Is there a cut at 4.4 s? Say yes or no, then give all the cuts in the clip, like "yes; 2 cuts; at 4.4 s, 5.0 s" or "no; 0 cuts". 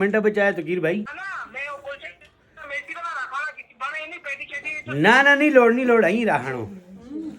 no; 1 cut; at 1.1 s